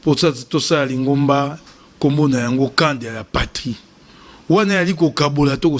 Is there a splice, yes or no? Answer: no